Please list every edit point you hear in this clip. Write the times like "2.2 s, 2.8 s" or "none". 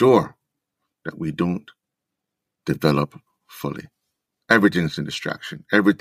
none